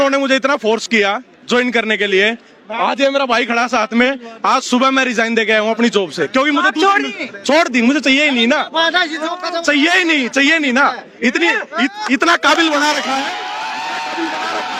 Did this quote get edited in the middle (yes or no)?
no